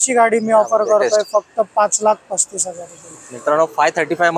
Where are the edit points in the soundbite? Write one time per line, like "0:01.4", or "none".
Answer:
none